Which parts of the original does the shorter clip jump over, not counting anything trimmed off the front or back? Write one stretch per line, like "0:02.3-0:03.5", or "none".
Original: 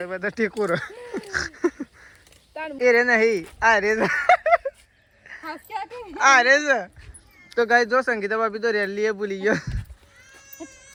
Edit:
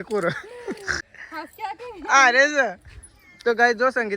0:01.4-0:05.1